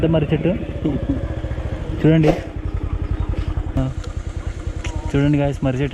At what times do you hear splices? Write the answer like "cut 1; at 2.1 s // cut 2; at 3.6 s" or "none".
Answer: cut 1; at 3.8 s